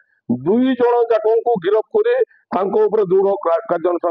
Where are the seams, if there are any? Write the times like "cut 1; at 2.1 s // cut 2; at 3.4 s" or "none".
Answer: none

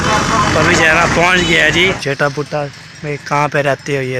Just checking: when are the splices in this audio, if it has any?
cut 1; at 2.0 s

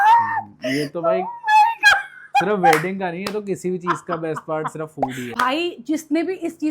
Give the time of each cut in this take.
cut 1; at 5.3 s

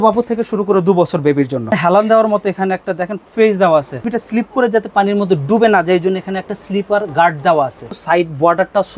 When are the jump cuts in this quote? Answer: cut 1; at 1.7 s // cut 2; at 4.2 s // cut 3; at 7.9 s

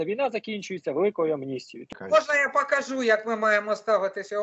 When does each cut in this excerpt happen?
cut 1; at 1.9 s

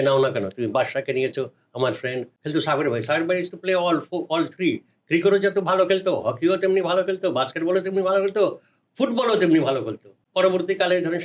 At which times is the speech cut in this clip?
cut 1; at 2.3 s // cut 2; at 10.1 s

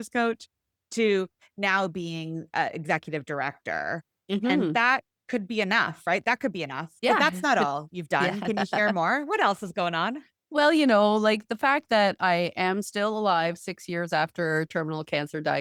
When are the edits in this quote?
none

